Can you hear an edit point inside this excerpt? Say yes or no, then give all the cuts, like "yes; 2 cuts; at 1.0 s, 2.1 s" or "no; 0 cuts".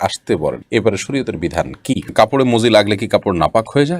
yes; 1 cut; at 2.1 s